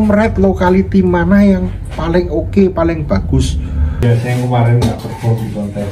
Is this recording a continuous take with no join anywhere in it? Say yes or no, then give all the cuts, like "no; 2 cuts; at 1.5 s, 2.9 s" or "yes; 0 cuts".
no; 1 cut; at 4.0 s